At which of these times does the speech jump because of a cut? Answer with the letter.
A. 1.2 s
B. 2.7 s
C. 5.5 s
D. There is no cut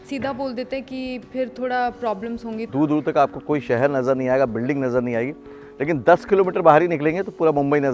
B